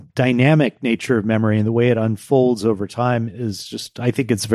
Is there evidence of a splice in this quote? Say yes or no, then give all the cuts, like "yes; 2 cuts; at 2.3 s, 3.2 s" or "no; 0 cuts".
no; 0 cuts